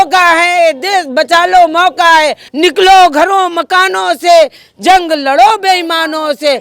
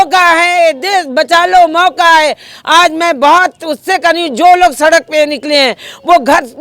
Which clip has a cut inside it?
first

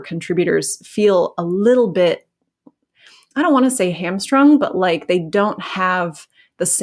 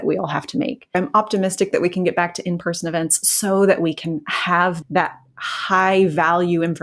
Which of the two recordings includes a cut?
second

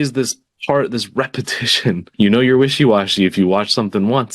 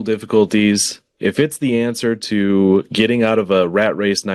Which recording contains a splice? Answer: first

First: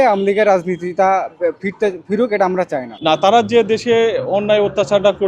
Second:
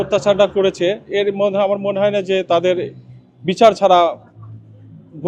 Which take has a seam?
first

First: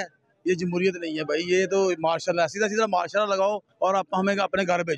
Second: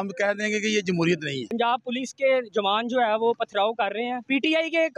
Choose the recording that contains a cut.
second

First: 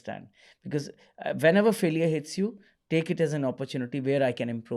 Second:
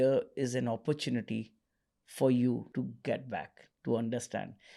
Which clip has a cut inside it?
second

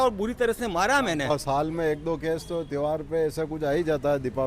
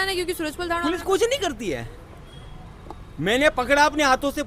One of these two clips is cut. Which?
first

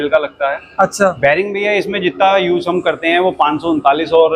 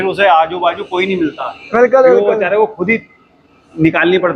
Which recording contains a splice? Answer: first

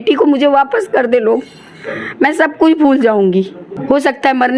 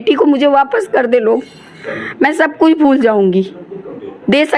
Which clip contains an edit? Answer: first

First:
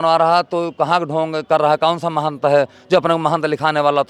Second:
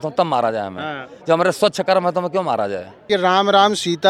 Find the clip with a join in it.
second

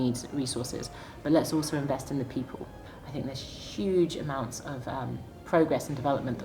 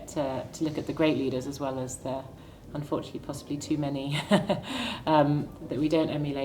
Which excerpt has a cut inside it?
first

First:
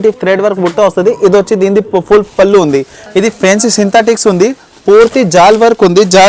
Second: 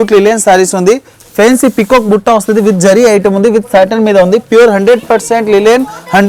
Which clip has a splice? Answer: first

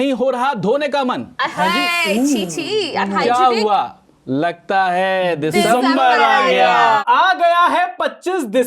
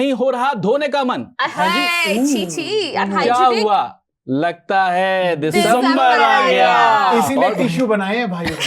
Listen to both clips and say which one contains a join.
first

